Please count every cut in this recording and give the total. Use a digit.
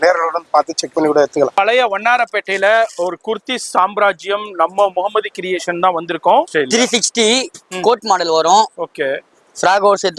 2